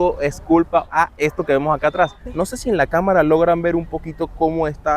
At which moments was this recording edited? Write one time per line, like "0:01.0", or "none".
0:00.9
0:02.2

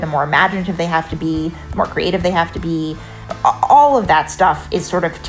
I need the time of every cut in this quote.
0:03.1

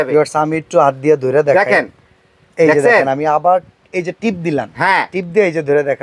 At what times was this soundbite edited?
none

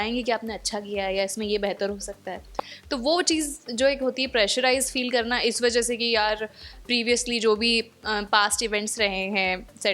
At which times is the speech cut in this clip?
none

